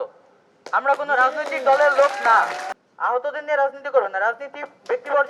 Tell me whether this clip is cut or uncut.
cut